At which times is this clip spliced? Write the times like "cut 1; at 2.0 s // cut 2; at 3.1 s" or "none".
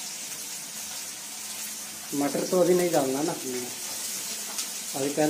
none